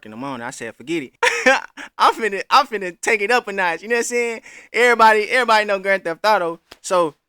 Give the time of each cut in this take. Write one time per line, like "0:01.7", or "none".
0:01.1

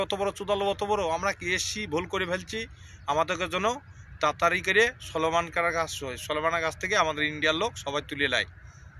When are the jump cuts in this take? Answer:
none

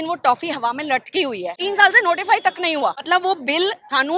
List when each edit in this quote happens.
0:01.5
0:03.0

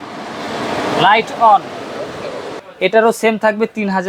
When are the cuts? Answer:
0:02.6

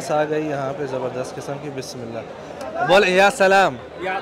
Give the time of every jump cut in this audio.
0:02.5

